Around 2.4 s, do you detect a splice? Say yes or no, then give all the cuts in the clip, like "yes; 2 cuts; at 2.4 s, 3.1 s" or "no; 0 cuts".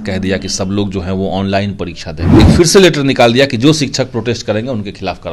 yes; 1 cut; at 2.4 s